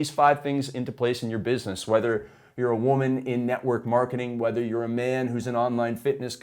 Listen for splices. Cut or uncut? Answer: uncut